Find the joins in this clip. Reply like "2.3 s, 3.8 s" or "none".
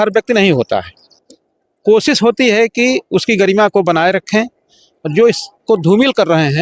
1.0 s

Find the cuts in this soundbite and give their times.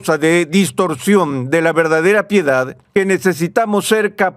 2.8 s

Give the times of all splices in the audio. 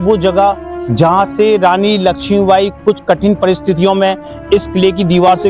none

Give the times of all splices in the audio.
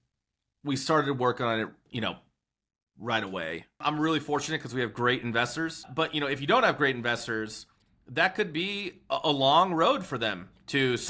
3.8 s

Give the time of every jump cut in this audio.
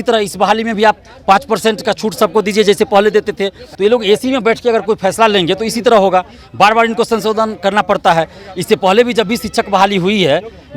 3.6 s

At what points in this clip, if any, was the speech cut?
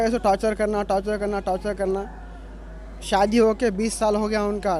none

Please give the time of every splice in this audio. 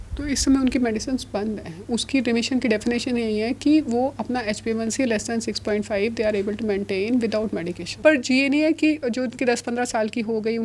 8.0 s

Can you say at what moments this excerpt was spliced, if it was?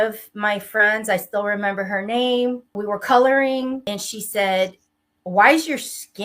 2.8 s, 3.9 s

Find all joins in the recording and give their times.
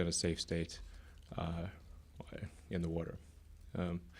1.9 s

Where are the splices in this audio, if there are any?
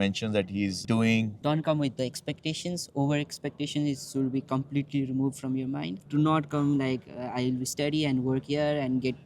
1.4 s, 6.0 s

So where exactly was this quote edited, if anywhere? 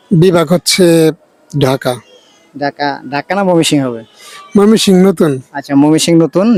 none

